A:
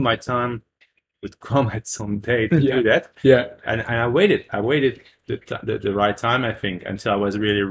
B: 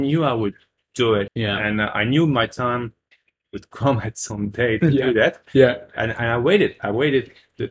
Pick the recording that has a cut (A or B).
B